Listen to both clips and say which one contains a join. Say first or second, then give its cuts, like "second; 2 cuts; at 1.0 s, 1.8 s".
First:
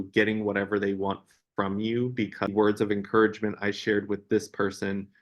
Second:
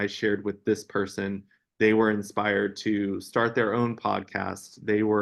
first; 1 cut; at 2.5 s